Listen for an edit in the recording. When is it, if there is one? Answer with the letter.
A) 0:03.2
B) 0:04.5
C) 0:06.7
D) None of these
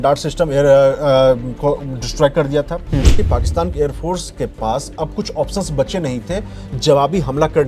A